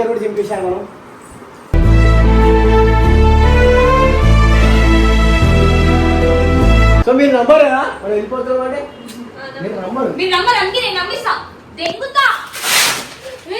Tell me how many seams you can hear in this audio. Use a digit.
1